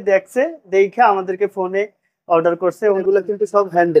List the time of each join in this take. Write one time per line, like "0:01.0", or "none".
0:03.0